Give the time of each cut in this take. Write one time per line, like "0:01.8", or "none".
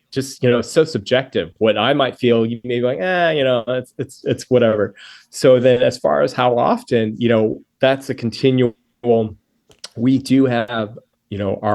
none